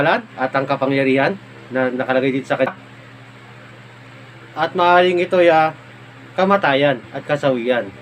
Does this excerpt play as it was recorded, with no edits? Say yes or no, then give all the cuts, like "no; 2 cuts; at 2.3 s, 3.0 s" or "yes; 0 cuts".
no; 1 cut; at 2.7 s